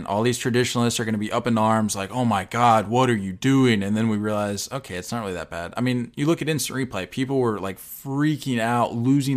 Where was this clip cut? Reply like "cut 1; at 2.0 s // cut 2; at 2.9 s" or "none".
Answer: none

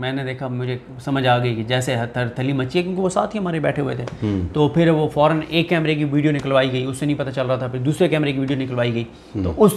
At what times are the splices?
none

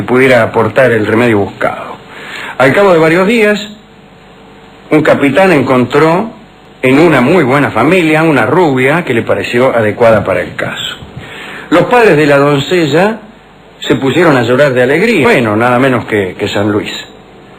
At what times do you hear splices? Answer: none

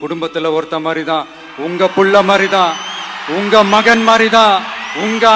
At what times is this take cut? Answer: none

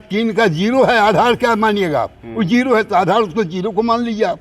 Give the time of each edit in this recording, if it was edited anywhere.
none

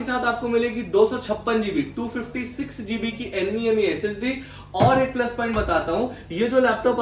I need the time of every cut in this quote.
none

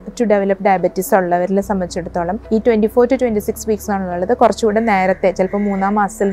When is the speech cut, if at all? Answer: cut 1; at 2.4 s

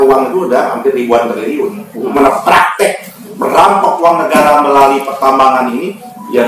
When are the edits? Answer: cut 1; at 2.1 s

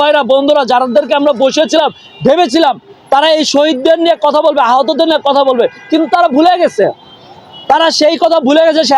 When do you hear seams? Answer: none

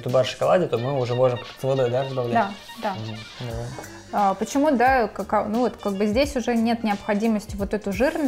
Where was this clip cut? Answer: none

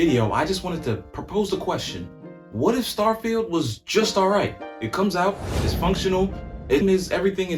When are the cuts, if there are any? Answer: none

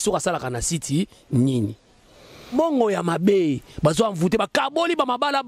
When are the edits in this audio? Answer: cut 1; at 2.3 s

